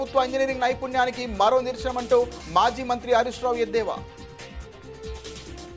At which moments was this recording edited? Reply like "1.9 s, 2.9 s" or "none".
none